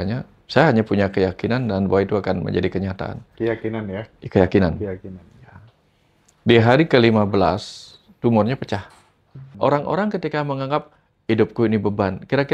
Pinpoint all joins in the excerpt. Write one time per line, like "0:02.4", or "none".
0:09.4